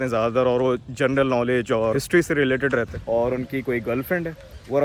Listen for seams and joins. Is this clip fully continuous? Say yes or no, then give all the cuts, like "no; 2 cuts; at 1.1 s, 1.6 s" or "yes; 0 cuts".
no; 1 cut; at 3.0 s